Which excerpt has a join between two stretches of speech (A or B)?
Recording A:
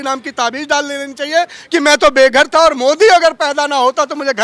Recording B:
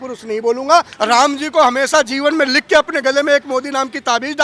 B